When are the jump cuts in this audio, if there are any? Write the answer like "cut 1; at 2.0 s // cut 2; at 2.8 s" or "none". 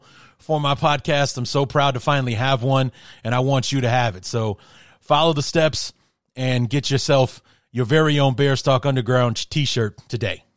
none